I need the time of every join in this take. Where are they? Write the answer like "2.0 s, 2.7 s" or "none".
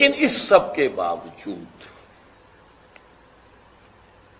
none

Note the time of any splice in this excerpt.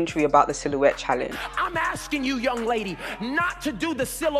1.4 s

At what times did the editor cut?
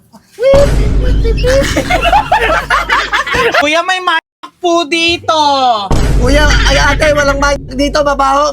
3.6 s

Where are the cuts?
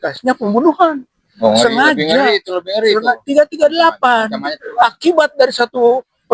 1.3 s, 4.6 s

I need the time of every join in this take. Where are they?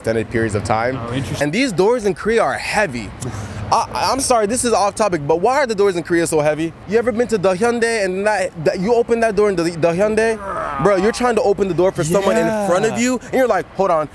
1.3 s, 6.8 s

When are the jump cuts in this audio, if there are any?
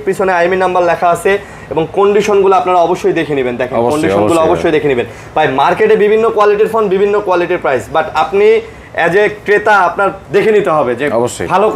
none

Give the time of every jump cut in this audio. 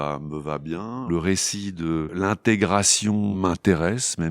1.1 s, 2.1 s, 3.3 s

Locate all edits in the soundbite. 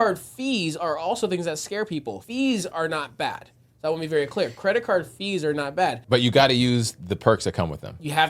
2.2 s, 6.0 s

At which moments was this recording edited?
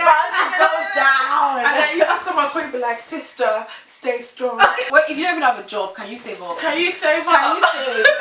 4.8 s

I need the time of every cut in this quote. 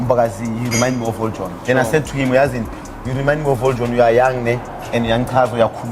1.5 s

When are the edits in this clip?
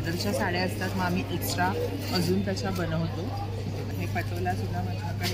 3.9 s

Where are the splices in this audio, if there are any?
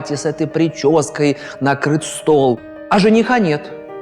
2.7 s

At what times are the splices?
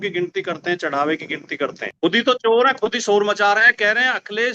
1.9 s

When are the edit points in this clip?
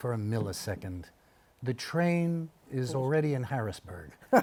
none

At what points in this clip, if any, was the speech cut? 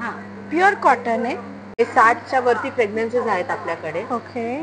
1.7 s

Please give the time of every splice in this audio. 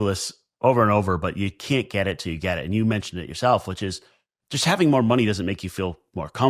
none

